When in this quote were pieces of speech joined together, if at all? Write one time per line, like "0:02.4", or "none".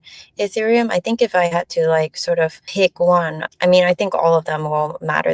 0:02.6
0:03.4